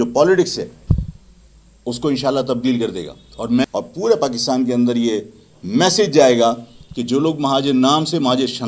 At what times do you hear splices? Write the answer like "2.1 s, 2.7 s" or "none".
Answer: 3.6 s